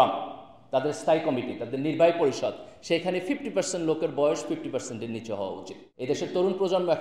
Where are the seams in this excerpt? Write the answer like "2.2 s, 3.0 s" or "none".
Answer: 5.8 s